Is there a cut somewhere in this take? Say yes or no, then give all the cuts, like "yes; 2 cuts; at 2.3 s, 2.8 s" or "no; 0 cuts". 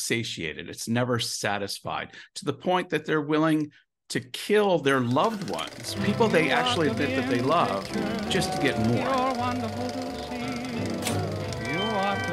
yes; 1 cut; at 9.0 s